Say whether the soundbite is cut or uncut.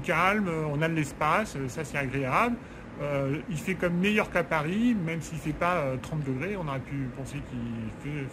uncut